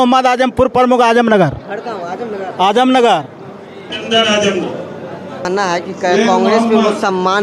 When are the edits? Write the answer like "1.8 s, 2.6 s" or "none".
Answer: 5.5 s